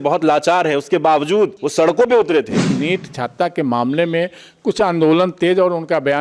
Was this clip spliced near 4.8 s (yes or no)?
no